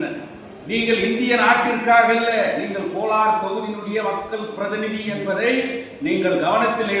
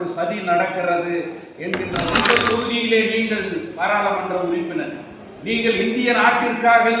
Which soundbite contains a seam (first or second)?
second